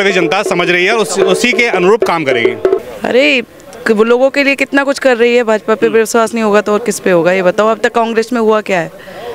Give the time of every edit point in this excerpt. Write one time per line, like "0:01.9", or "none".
0:02.8